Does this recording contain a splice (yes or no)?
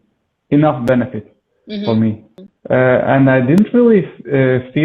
yes